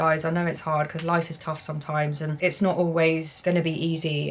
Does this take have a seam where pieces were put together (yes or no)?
yes